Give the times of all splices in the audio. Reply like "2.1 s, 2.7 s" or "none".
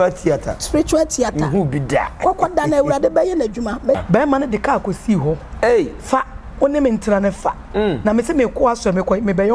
4.0 s